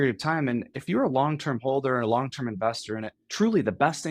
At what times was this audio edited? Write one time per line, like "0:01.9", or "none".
0:03.2